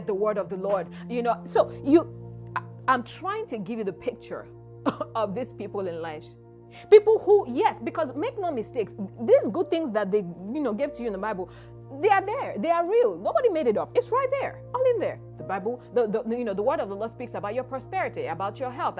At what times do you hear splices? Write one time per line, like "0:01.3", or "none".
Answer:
none